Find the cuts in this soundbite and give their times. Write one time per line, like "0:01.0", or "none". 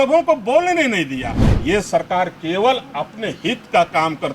0:01.5